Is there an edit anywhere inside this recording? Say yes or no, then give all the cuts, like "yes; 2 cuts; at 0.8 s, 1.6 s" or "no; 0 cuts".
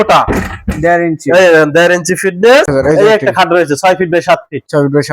yes; 1 cut; at 2.7 s